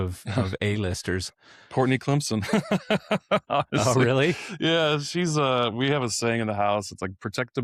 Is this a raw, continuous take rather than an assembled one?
yes; 0 cuts

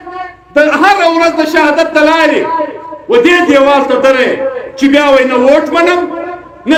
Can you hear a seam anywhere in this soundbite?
no; 0 cuts

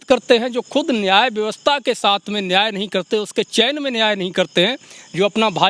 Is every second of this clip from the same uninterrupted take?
yes; 0 cuts

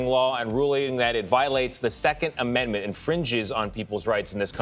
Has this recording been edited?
no; 0 cuts

